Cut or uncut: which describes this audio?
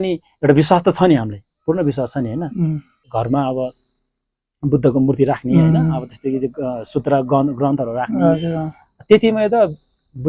cut